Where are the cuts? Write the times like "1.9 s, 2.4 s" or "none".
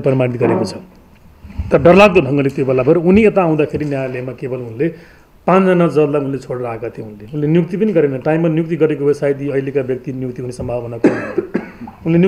none

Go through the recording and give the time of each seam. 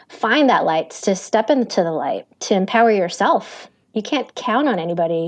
none

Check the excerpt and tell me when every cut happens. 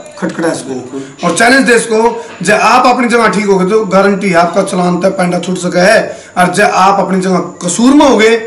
none

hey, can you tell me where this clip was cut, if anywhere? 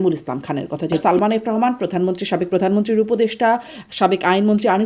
1.0 s

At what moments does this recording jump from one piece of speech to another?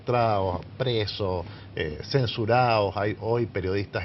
none

